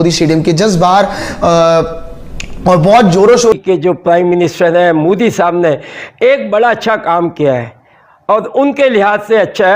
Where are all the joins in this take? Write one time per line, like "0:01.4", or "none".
0:03.5